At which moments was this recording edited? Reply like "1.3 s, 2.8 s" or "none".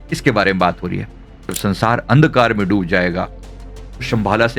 1.6 s